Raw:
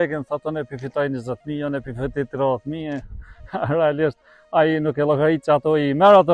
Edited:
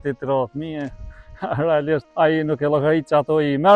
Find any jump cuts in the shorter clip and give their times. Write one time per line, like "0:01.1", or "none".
0:02.1